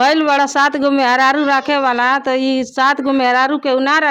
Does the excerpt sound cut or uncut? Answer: uncut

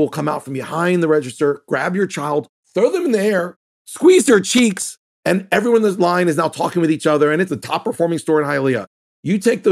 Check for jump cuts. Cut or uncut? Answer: cut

